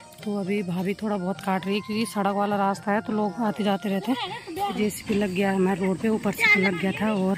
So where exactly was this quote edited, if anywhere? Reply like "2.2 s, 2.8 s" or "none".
4.7 s